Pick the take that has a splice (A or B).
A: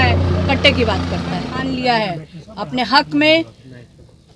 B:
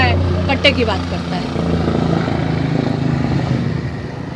A